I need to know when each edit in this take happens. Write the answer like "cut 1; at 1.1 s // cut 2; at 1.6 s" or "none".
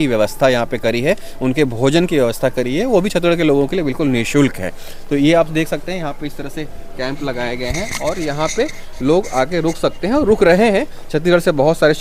none